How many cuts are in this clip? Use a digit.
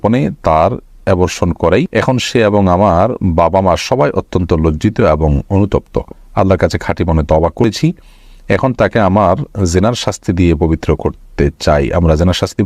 2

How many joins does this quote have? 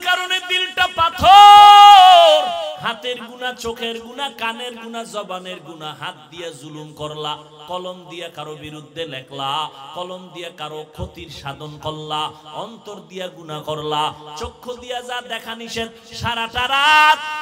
1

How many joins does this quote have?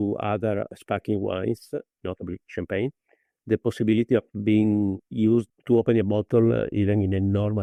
0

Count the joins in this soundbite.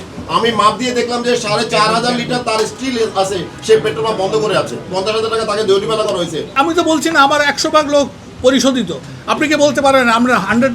1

